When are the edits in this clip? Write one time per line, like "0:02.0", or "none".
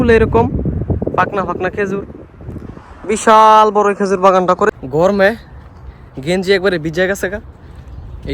0:04.7